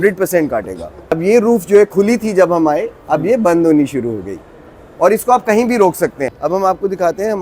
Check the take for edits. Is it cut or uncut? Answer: cut